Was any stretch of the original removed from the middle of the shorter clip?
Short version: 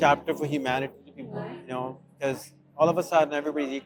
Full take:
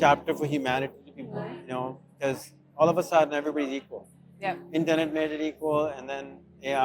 no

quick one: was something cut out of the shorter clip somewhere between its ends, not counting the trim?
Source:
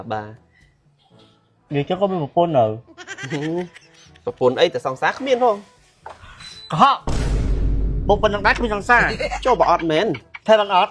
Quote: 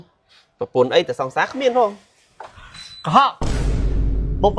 no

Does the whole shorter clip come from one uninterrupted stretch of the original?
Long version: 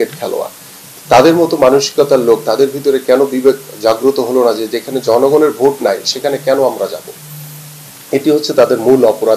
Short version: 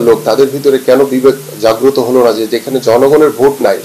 yes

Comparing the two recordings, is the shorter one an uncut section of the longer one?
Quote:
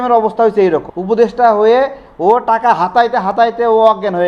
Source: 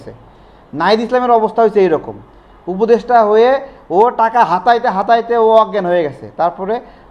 no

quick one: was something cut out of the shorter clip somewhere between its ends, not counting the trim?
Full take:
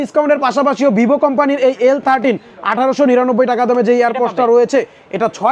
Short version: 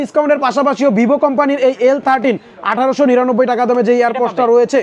no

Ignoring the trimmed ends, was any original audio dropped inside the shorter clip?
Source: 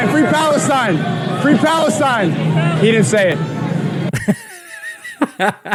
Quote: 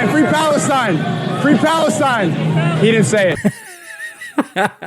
yes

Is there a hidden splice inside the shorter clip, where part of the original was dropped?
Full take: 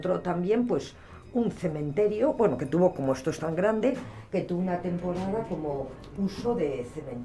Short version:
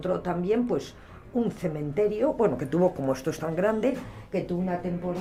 no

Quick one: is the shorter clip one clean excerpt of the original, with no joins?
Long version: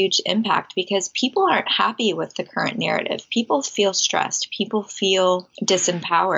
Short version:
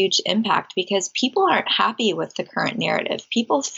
yes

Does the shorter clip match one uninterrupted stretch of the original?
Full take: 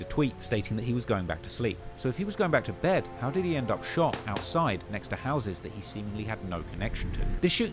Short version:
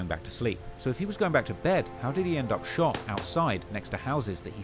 yes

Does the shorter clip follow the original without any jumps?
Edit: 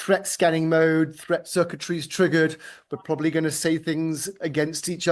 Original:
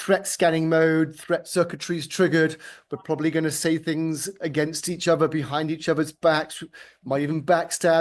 yes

